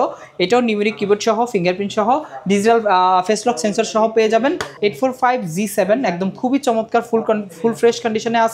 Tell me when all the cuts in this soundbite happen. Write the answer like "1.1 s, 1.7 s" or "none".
4.7 s